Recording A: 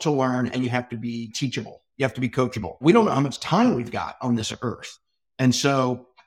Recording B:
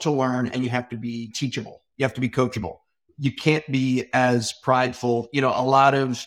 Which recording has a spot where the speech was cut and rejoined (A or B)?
A